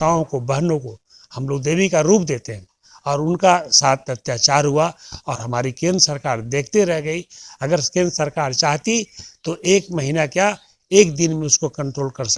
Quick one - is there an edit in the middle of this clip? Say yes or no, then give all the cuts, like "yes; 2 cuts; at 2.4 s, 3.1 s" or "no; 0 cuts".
no; 0 cuts